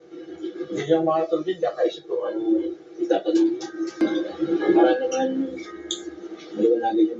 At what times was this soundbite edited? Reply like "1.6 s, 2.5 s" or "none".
3.6 s

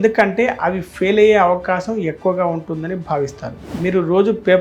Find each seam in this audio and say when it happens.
3.6 s

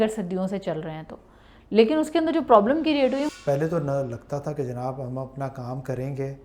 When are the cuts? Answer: 3.3 s

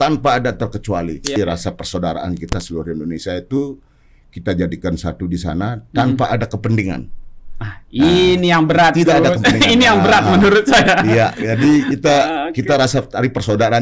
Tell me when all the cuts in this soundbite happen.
1.4 s

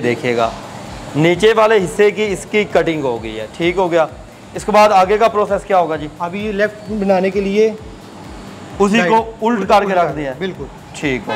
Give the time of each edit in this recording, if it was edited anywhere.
none

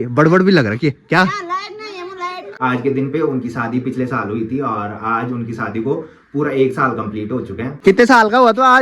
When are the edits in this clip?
2.5 s, 7.7 s

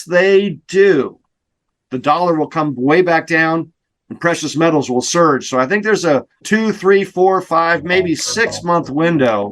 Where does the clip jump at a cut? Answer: 6.4 s

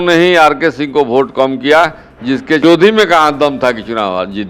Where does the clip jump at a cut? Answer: 2.6 s

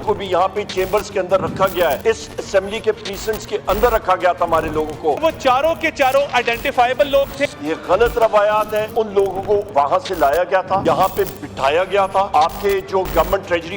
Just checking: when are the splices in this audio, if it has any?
2.0 s, 5.2 s, 7.4 s, 8.9 s, 10.8 s, 12.3 s

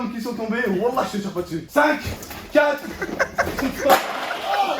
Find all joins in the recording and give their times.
1.8 s

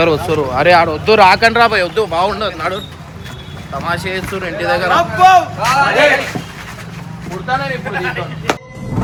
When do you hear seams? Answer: none

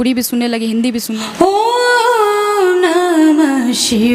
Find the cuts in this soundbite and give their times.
1.1 s

